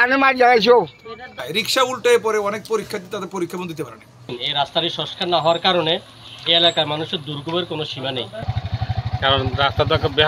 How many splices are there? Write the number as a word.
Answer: three